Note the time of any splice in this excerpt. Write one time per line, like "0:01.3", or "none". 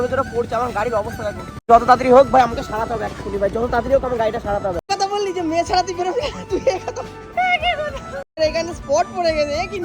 0:01.7
0:04.9
0:08.4